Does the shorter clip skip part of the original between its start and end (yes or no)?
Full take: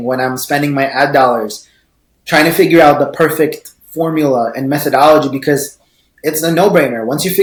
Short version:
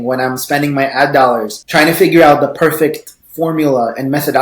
yes